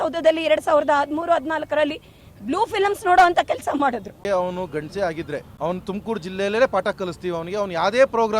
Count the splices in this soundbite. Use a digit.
2